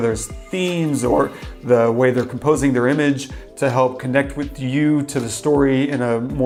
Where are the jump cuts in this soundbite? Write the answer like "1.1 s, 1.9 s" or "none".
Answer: none